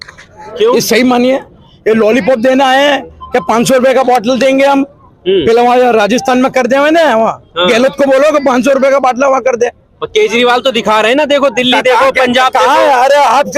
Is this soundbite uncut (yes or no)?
yes